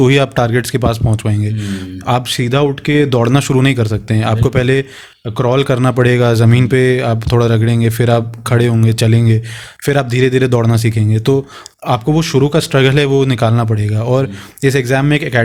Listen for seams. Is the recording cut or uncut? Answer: uncut